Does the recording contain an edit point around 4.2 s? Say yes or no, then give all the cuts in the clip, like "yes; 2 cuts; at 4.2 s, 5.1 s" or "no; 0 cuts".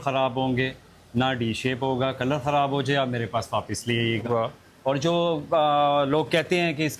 no; 0 cuts